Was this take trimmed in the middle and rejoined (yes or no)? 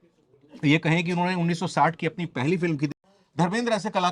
yes